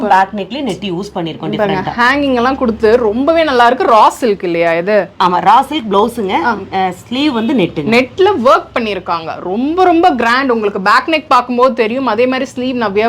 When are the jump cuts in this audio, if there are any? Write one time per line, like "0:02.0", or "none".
none